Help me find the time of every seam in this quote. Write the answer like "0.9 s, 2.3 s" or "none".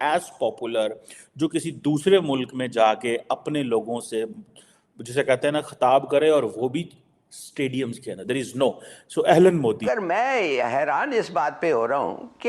10.0 s